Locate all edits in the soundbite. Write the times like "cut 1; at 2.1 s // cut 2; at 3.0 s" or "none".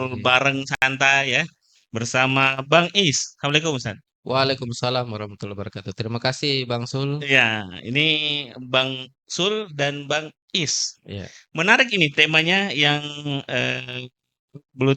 none